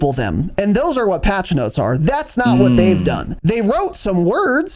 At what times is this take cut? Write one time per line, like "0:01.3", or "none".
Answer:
0:03.3